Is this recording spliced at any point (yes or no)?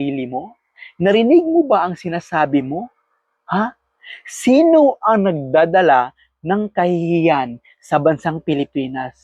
no